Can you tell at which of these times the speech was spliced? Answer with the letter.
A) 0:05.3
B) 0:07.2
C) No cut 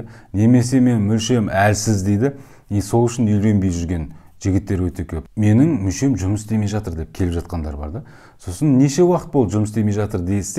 A